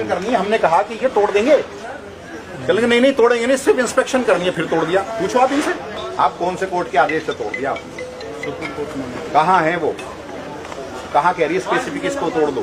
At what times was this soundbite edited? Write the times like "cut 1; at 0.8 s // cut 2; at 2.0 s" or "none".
cut 1; at 6.0 s